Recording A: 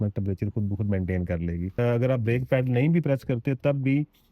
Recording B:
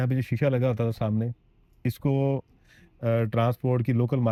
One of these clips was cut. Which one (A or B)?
A